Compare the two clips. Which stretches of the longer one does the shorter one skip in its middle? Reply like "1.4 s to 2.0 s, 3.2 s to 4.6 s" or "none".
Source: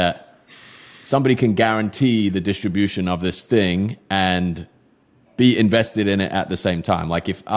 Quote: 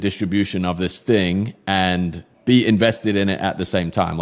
4.7 s to 5.2 s